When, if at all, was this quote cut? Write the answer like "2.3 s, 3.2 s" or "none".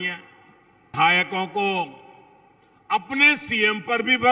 0.9 s